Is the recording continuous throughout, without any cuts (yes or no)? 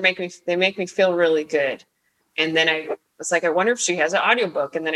no